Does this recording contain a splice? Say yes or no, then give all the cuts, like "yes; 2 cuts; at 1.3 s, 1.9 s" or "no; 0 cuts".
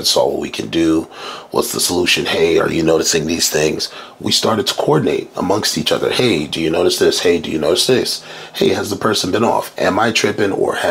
no; 0 cuts